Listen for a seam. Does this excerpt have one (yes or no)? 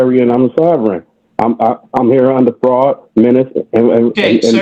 no